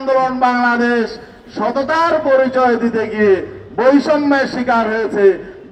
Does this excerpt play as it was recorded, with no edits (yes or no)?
yes